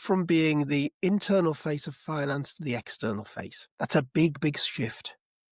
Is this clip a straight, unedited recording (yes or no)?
no